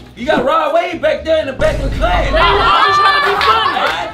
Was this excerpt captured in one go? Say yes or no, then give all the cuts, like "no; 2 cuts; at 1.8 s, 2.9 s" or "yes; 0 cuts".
yes; 0 cuts